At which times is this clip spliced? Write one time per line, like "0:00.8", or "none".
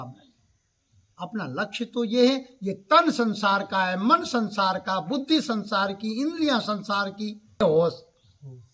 0:07.6